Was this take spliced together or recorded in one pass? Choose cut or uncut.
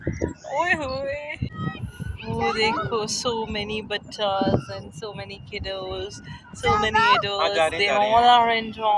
uncut